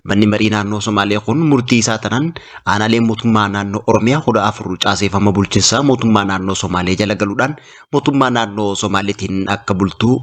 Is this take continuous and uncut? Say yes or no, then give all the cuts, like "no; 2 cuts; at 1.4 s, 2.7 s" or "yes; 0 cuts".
yes; 0 cuts